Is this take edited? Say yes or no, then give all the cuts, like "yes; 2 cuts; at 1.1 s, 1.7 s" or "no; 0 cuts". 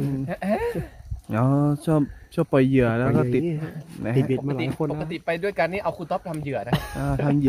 no; 0 cuts